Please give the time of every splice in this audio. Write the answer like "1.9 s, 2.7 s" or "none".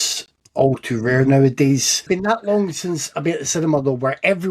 1.9 s